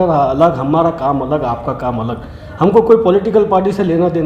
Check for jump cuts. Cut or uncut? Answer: uncut